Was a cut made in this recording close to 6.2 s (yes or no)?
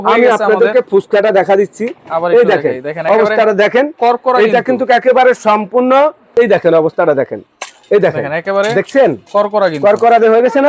yes